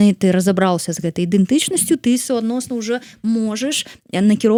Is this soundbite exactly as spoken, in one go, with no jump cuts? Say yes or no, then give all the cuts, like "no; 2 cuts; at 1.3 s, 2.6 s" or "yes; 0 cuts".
yes; 0 cuts